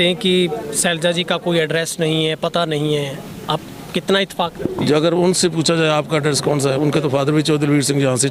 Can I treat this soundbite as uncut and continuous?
yes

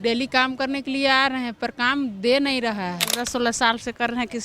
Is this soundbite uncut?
no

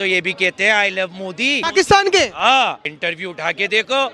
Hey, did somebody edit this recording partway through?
yes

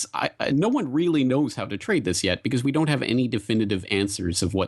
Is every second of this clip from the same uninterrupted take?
yes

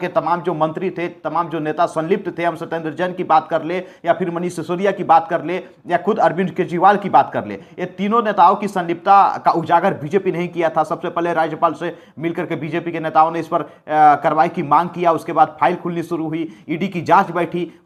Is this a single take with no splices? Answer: yes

